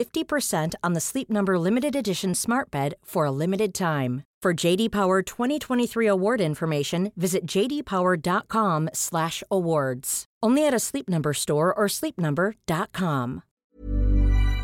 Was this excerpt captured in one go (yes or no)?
no